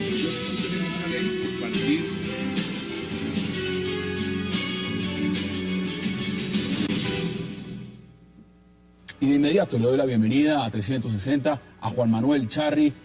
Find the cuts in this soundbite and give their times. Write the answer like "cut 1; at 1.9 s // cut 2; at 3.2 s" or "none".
none